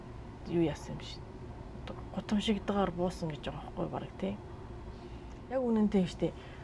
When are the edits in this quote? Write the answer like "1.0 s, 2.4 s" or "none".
5.3 s